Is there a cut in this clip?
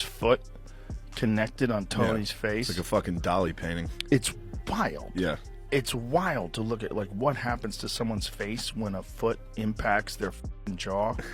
no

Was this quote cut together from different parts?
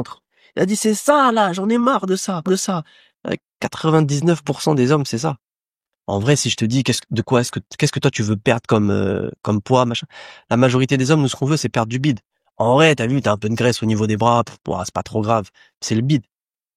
no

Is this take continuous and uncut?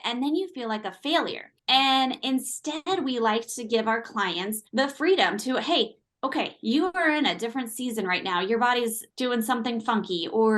yes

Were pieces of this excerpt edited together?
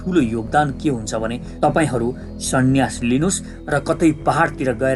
yes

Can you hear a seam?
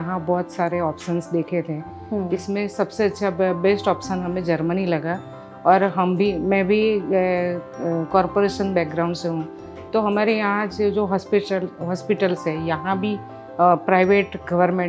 no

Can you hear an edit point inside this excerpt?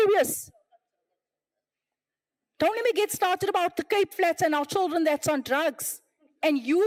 no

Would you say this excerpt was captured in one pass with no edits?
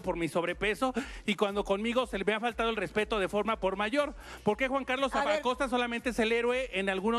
yes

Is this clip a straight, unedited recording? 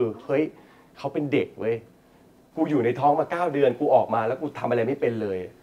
yes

